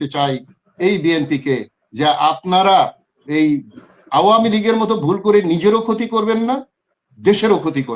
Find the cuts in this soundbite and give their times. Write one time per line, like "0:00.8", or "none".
none